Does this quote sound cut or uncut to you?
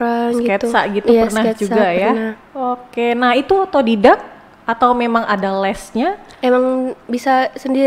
uncut